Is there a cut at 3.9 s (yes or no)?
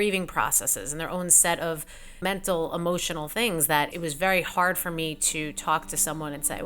yes